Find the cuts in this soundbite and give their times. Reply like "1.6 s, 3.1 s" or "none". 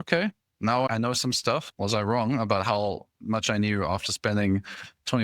1.7 s